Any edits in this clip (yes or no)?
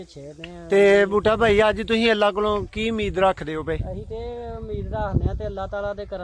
no